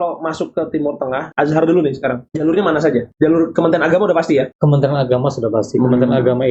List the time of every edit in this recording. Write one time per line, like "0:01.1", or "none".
0:01.2
0:02.3
0:03.1
0:04.5